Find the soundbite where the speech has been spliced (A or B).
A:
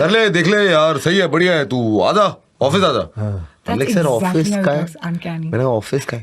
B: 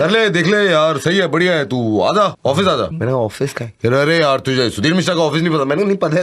B